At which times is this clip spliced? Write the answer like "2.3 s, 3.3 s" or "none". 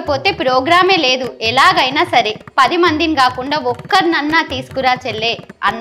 none